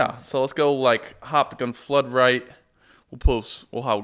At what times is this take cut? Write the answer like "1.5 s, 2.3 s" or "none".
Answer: none